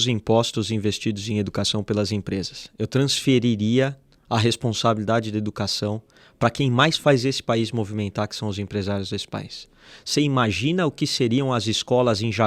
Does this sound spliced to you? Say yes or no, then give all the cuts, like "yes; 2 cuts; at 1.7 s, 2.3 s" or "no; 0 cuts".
no; 0 cuts